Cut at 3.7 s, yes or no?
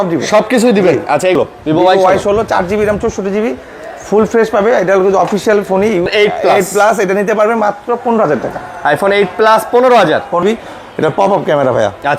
no